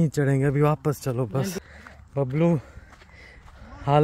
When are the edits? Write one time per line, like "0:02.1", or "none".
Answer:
0:01.6